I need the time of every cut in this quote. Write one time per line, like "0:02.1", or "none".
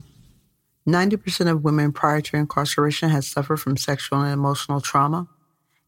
none